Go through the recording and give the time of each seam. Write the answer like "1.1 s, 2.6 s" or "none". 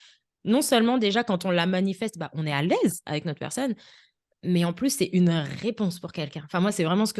none